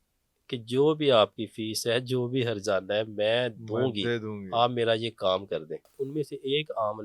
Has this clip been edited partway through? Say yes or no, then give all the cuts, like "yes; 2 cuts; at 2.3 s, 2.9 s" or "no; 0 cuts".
yes; 1 cut; at 5.9 s